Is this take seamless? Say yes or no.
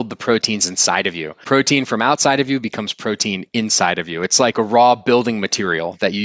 no